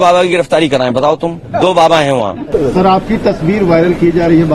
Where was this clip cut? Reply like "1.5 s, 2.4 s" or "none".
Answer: 1.4 s, 2.4 s